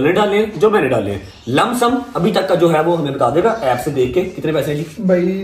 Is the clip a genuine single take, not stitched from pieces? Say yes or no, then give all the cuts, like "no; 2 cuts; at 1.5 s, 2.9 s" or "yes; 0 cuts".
yes; 0 cuts